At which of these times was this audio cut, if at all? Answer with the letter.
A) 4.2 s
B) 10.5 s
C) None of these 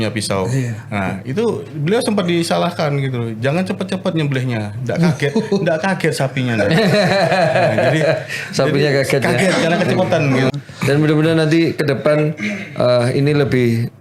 B